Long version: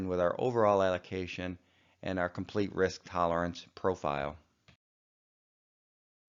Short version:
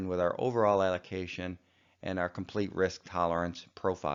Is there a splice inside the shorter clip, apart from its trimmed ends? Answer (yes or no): no